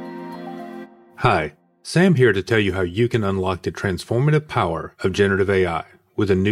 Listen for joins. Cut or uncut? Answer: cut